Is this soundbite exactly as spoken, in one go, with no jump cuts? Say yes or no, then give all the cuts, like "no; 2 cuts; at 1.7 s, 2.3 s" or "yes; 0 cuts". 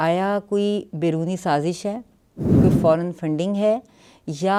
yes; 0 cuts